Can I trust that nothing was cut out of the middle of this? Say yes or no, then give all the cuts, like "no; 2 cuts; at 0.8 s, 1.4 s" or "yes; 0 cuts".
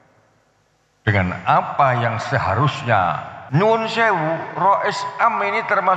no; 1 cut; at 3.3 s